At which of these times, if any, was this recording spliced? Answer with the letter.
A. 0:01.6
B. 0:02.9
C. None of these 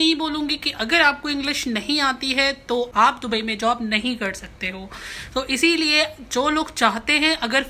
B